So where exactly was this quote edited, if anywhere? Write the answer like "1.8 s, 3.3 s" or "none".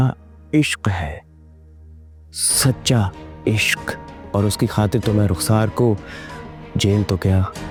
none